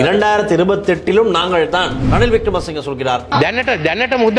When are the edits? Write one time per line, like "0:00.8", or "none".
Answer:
0:02.0
0:03.2